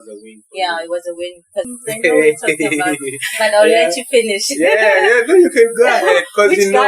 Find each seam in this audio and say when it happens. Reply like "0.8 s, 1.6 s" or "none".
1.7 s